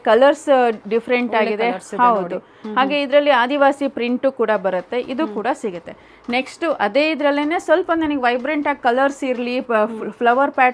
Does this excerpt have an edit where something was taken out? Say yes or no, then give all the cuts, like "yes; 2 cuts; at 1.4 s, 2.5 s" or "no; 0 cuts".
no; 0 cuts